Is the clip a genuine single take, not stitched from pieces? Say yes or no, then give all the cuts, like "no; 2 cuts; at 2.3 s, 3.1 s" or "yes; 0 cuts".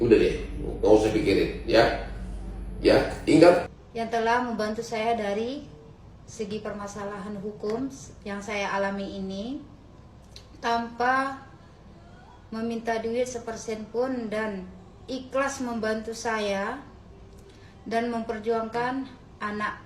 no; 1 cut; at 3.6 s